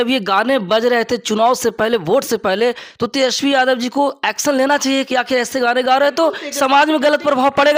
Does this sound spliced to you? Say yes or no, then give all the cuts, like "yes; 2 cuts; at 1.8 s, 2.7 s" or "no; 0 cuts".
no; 0 cuts